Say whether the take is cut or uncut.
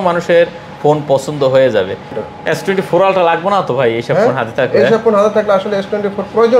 cut